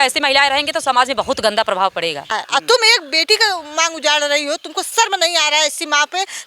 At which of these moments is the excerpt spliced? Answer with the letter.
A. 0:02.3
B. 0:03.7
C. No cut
A